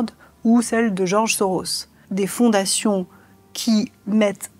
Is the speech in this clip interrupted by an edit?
yes; 1 cut; at 2.0 s

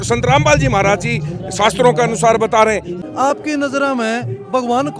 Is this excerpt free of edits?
no; 1 cut; at 3.0 s

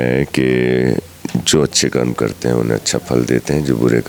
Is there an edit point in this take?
no; 0 cuts

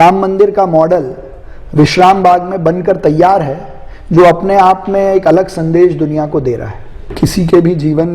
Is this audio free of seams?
no; 1 cut; at 7.0 s

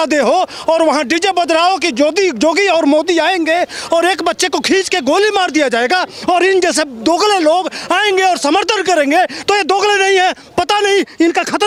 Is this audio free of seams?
yes; 0 cuts

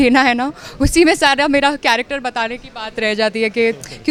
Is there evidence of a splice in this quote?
no; 0 cuts

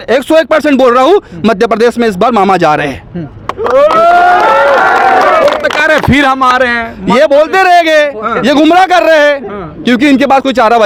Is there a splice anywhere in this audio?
no; 0 cuts

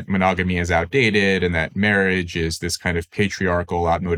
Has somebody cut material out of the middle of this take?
no; 0 cuts

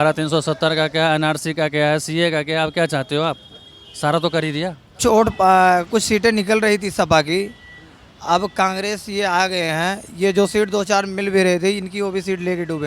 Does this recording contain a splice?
yes; 1 cut; at 5.0 s

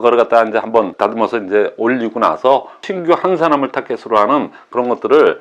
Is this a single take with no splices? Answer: no; 1 cut; at 2.8 s

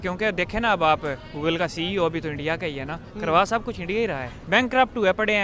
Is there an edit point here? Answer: yes; 1 cut; at 4.3 s

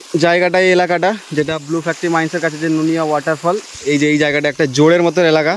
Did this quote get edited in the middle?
no; 0 cuts

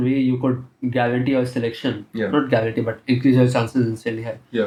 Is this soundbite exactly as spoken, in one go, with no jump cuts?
yes; 0 cuts

